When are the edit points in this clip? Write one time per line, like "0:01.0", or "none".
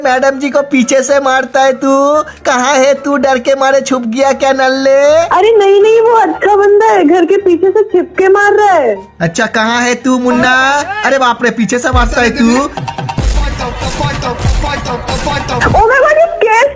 none